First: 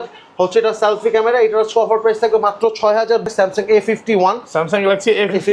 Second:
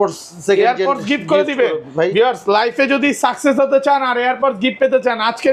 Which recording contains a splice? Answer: first; 1 cut; at 3.3 s

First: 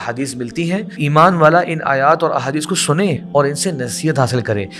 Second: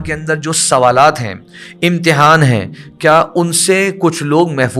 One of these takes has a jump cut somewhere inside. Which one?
first; 2 cuts; at 0.9 s, 3.2 s

